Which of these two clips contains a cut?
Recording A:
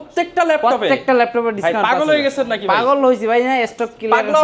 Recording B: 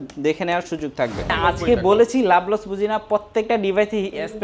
B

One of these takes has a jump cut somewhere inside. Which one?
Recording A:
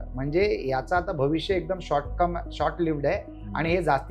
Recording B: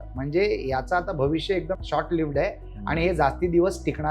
B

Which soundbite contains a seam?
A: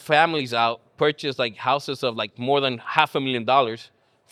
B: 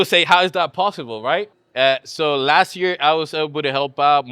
B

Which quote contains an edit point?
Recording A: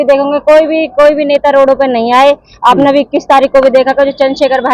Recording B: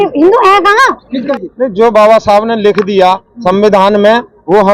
B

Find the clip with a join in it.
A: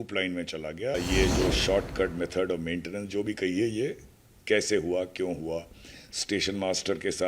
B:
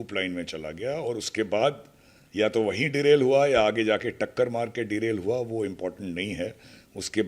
A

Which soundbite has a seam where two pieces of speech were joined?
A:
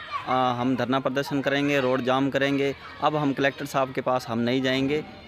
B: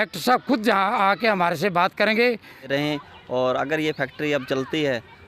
B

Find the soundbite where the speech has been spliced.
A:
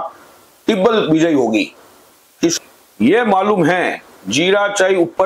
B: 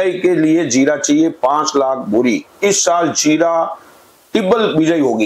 A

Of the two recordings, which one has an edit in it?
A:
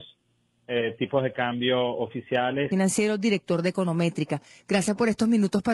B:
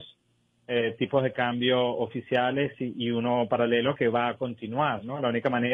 B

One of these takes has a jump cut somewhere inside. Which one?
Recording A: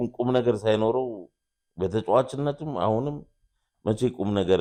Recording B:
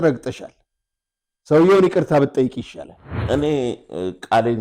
B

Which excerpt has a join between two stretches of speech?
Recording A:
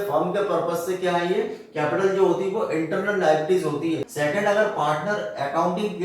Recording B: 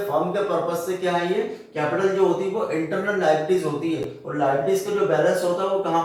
A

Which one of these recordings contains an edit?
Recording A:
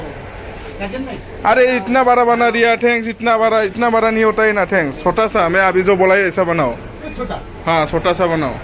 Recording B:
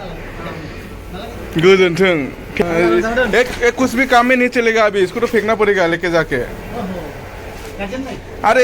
B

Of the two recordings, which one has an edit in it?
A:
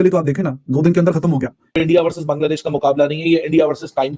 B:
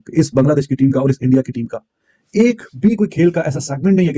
A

